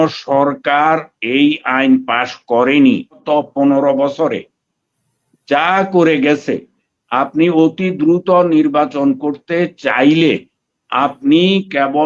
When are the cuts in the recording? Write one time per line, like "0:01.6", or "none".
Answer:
0:03.2